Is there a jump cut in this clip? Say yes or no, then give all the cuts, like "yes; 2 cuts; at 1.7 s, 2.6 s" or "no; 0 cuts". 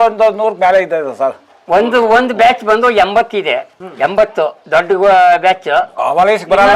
yes; 1 cut; at 4.6 s